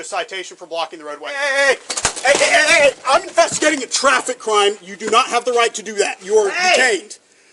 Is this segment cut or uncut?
cut